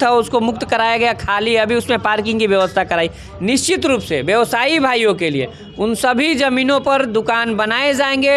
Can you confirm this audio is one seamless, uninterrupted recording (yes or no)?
yes